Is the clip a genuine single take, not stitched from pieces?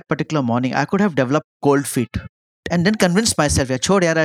no; 1 cut; at 2.6 s

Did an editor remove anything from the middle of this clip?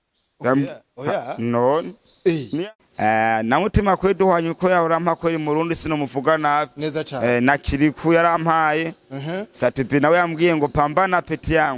yes; 1 cut; at 2.6 s

